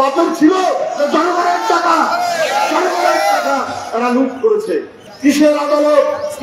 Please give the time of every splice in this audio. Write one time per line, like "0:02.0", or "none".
0:04.9